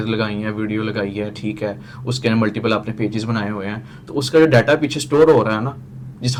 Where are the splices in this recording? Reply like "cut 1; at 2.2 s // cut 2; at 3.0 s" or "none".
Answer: none